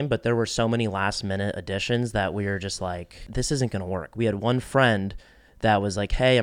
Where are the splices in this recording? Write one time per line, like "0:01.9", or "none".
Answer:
0:03.2